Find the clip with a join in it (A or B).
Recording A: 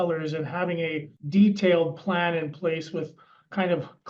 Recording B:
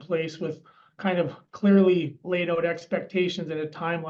A